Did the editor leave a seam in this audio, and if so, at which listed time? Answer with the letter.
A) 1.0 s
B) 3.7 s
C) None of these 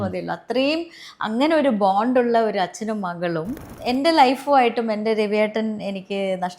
B